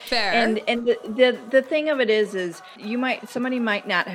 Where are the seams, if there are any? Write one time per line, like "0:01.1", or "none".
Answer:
0:02.7